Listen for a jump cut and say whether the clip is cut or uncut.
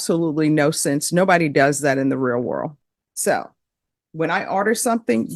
uncut